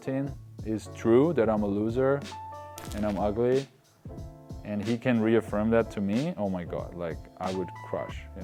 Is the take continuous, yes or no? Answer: yes